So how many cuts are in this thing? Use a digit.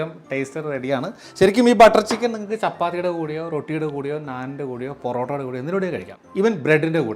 1